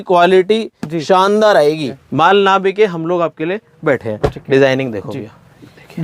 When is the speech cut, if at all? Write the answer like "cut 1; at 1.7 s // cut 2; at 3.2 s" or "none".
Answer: cut 1; at 1.9 s